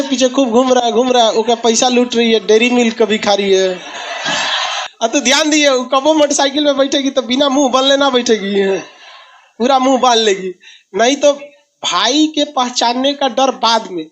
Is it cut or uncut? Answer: cut